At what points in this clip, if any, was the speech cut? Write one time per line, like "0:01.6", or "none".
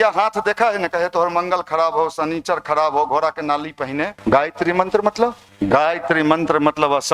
0:04.1
0:05.4